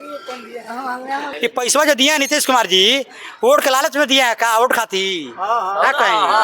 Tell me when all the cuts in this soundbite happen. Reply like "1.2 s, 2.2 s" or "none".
1.3 s